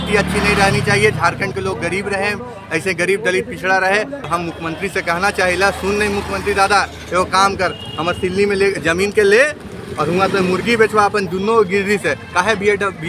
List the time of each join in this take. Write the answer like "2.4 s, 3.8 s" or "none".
4.2 s